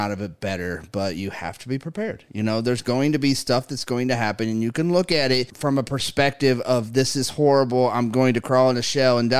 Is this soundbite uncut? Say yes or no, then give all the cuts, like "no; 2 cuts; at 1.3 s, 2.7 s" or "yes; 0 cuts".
no; 1 cut; at 5.5 s